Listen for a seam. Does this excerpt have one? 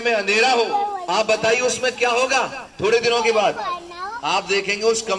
no; 0 cuts

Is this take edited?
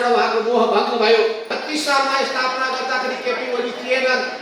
yes; 1 cut; at 1.5 s

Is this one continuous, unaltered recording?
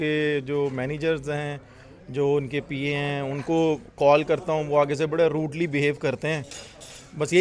yes; 0 cuts

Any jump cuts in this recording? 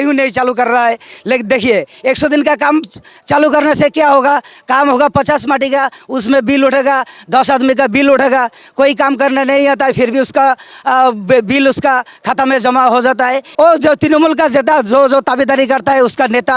yes; 1 cut; at 13.4 s

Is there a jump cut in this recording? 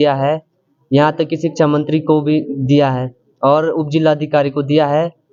no; 0 cuts

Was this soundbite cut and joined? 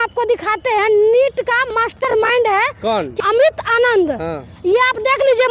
yes; 1 cut; at 3.2 s

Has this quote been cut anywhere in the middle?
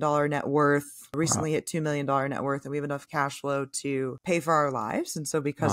yes; 1 cut; at 1.1 s

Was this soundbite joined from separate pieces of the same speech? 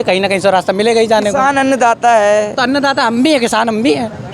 no; 0 cuts

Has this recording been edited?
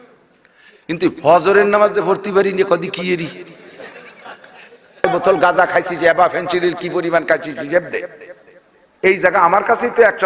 yes; 1 cut; at 5.0 s

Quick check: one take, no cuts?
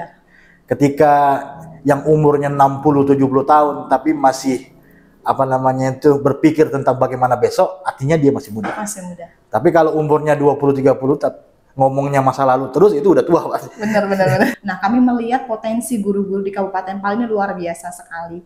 no; 1 cut; at 14.5 s

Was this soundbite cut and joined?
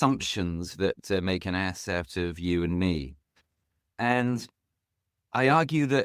no; 0 cuts

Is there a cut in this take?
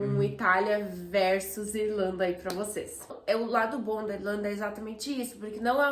yes; 1 cut; at 3.1 s

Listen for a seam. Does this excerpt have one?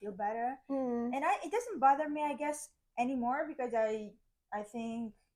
no; 0 cuts

